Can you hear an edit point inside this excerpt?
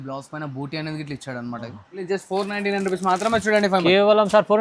yes; 1 cut; at 2.0 s

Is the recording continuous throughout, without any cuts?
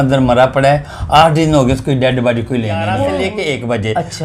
no; 1 cut; at 3.3 s

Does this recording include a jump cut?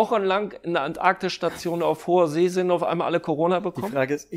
no; 0 cuts

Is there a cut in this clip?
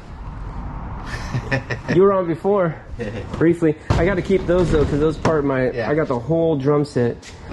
no; 0 cuts

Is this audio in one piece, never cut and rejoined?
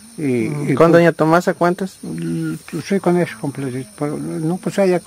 yes; 0 cuts

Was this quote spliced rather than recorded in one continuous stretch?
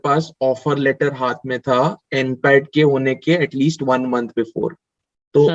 no; 0 cuts

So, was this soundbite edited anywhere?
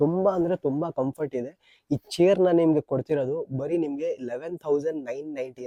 no; 0 cuts

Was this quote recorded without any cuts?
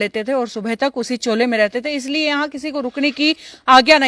yes; 0 cuts

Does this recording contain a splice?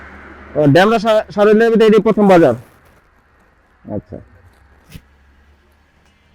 no; 0 cuts

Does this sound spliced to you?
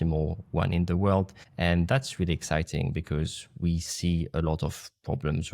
yes; 1 cut; at 1.4 s

